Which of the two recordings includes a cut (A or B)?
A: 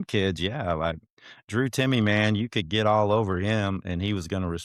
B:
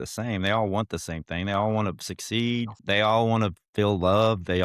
B